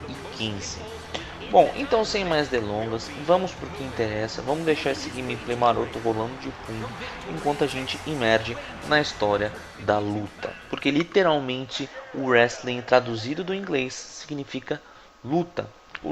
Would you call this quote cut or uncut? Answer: cut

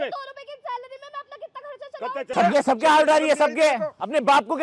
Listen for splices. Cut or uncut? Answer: cut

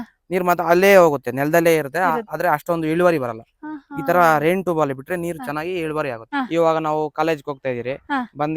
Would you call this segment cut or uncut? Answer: cut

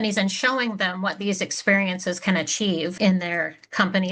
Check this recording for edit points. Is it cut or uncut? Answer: cut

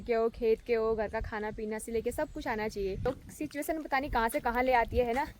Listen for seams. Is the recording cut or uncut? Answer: cut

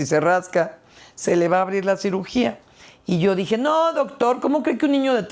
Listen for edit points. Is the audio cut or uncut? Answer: uncut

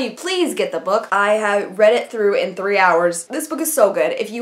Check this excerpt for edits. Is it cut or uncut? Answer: cut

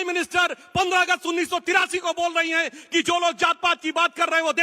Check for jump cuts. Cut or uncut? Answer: uncut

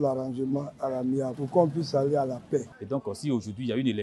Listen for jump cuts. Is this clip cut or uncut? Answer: cut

